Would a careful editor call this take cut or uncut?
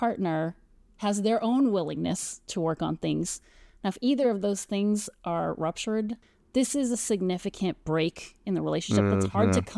cut